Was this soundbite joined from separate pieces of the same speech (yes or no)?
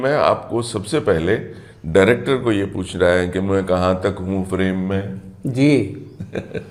no